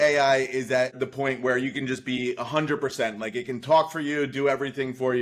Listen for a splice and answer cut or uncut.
cut